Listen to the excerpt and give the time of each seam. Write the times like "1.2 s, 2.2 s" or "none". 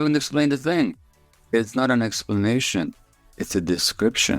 1.3 s